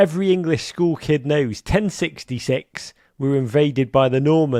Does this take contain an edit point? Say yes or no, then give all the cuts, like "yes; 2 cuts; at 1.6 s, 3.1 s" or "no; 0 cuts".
no; 0 cuts